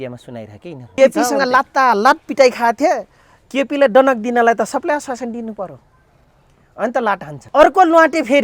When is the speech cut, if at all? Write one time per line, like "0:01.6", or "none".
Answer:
0:01.0
0:07.3